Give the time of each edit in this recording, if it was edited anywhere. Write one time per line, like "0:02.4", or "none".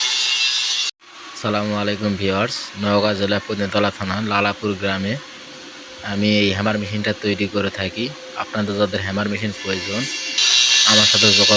0:01.0